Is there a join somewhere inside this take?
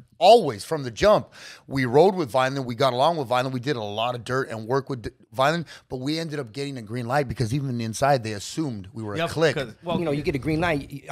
yes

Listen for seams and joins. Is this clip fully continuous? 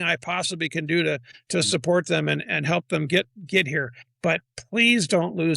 no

